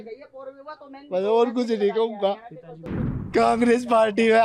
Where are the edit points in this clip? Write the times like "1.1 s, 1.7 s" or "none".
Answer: 3.2 s